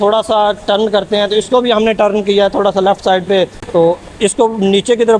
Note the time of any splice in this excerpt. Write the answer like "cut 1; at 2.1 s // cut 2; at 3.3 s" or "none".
none

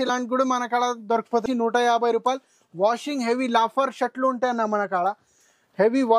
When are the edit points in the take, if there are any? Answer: cut 1; at 1.4 s

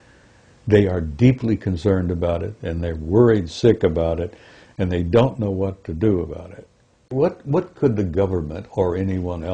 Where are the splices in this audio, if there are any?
cut 1; at 7.1 s

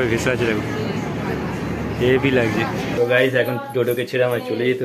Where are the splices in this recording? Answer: cut 1; at 2.9 s

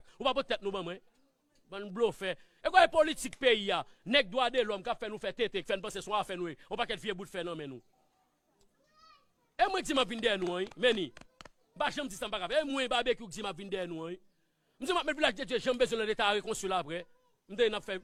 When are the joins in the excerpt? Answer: none

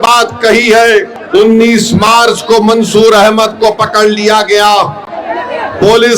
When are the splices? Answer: cut 1; at 1.2 s

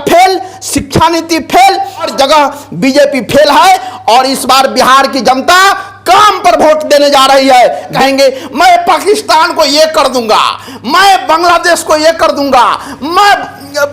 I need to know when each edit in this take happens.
cut 1; at 2.1 s // cut 2; at 7.9 s

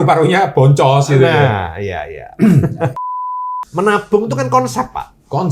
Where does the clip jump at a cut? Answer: cut 1; at 3.3 s

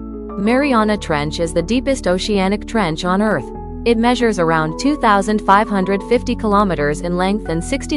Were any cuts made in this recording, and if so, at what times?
none

